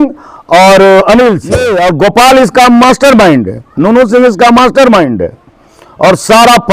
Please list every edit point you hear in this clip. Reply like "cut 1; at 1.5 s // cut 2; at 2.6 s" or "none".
cut 1; at 1.7 s